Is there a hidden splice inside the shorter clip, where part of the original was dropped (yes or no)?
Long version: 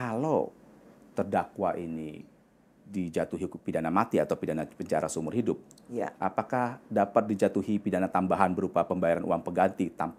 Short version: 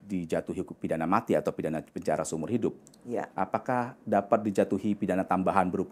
no